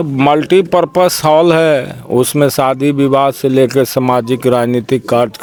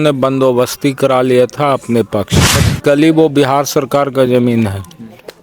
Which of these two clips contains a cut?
second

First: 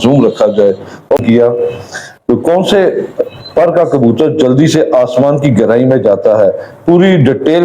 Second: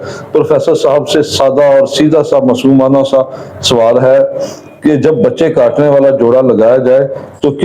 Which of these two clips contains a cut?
first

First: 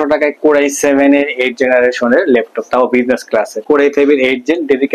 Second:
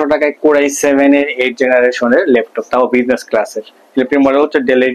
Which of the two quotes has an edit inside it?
first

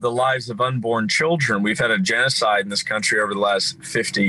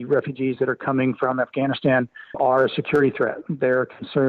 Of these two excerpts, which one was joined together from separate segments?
second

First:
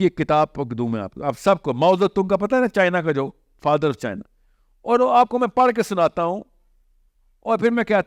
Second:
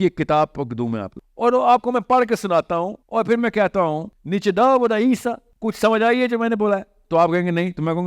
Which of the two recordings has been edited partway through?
second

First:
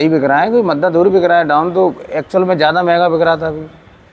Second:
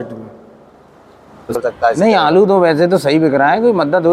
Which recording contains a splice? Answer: second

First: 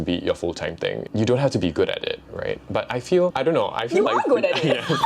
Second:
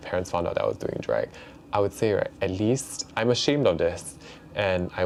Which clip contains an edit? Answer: first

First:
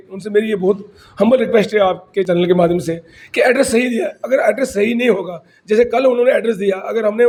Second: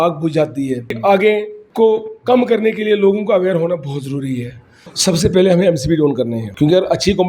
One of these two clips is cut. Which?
second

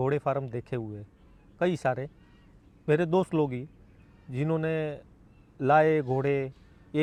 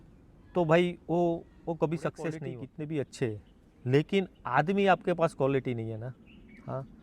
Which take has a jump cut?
second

